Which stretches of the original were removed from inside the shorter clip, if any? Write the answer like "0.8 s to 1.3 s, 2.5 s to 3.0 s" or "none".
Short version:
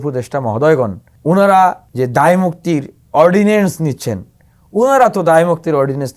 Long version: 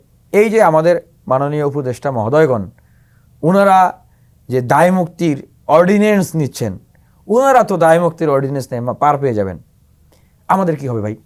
2.8 s to 3.2 s, 4.0 s to 4.4 s